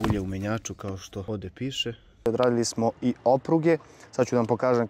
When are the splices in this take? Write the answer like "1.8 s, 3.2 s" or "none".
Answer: 1.2 s, 2.3 s